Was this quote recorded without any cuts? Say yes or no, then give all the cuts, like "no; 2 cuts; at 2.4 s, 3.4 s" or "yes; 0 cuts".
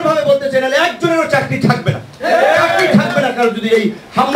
yes; 0 cuts